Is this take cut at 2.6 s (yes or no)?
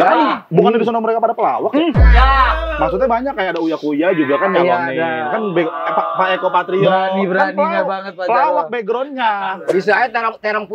no